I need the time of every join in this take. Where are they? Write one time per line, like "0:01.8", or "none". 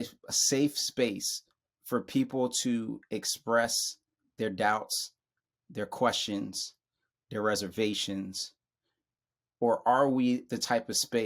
none

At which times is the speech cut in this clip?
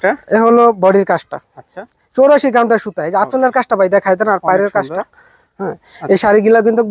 none

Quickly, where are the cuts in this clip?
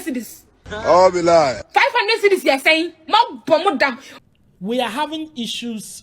0:04.1

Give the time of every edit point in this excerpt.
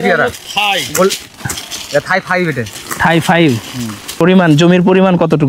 0:04.2

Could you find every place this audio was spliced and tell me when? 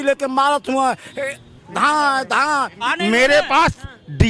0:02.8

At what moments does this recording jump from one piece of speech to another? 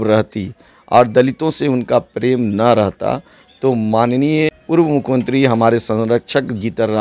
none

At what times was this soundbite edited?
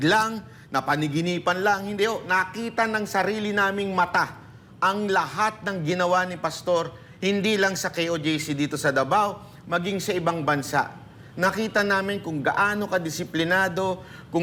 none

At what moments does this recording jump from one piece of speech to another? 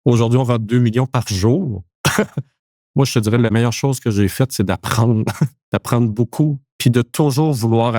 0:02.4
0:03.5
0:06.7

